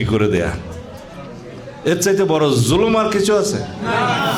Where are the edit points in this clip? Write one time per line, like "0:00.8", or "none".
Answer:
none